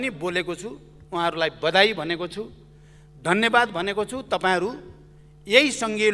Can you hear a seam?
no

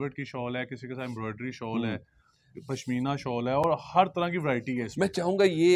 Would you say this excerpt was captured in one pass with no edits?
yes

